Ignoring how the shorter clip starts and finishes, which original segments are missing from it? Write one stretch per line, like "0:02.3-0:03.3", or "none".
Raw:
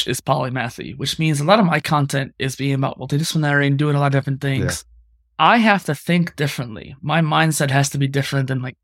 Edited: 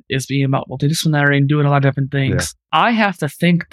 0:04.8-0:05.2